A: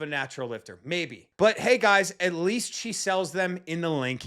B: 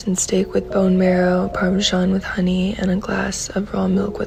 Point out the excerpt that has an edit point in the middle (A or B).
A